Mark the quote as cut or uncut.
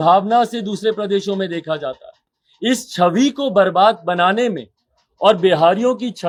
uncut